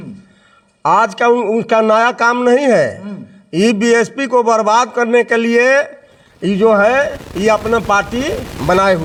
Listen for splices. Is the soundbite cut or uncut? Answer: uncut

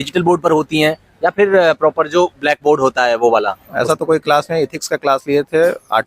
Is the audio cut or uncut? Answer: cut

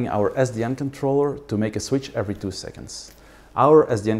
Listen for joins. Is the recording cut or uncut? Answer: uncut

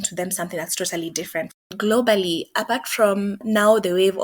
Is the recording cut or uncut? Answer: cut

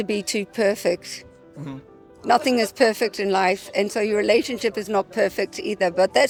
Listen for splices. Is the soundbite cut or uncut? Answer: uncut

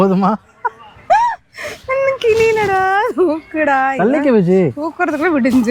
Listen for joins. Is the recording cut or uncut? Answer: uncut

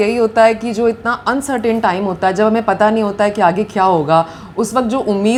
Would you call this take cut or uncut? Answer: uncut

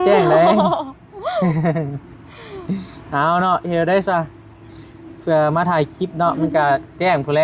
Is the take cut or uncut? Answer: uncut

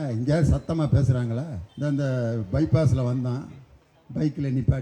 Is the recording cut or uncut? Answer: cut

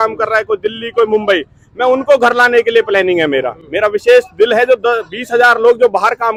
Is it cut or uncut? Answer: uncut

